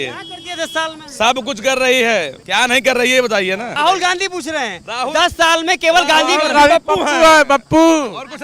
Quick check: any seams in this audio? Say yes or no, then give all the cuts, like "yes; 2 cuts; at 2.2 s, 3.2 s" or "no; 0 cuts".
no; 0 cuts